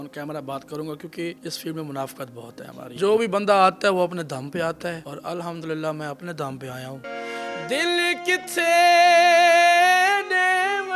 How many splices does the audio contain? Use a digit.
4